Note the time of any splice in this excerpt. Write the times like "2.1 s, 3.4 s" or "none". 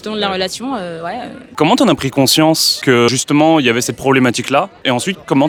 none